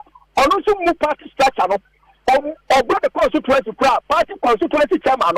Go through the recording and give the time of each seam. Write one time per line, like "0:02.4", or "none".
none